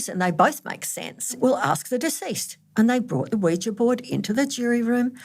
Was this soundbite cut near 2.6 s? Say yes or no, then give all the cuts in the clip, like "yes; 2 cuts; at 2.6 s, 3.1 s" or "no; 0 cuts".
no; 1 cut; at 1.4 s